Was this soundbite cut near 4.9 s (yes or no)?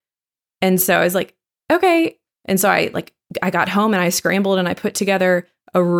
no